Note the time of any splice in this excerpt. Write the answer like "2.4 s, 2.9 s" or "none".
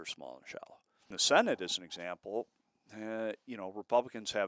1.2 s